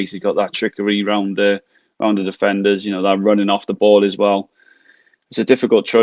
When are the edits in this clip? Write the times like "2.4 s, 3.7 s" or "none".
none